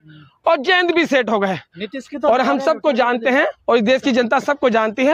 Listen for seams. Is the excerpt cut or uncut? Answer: uncut